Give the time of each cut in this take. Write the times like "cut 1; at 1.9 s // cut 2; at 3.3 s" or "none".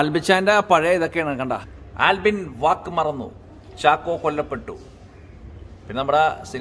cut 1; at 1.8 s